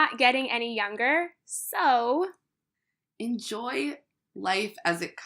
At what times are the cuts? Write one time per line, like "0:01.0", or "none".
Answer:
none

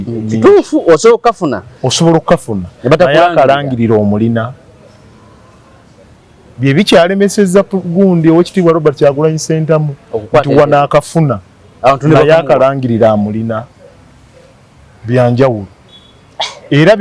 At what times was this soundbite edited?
none

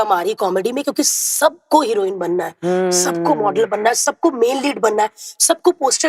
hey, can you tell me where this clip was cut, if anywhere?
none

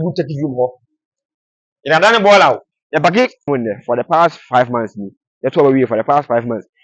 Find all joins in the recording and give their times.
0:03.4

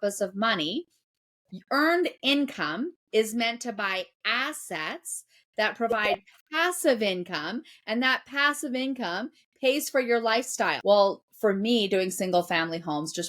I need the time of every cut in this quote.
0:10.8

